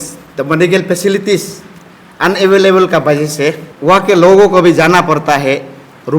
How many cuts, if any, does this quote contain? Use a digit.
1